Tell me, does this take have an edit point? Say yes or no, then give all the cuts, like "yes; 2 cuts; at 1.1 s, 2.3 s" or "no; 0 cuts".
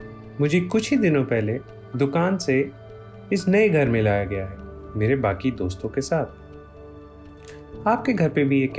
yes; 1 cut; at 4.4 s